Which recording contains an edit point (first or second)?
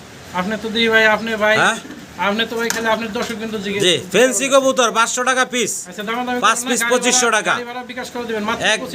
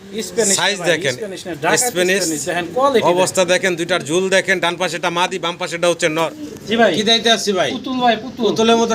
second